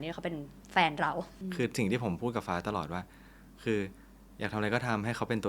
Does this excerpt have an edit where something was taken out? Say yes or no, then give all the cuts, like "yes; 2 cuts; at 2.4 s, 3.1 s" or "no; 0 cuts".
yes; 1 cut; at 1.4 s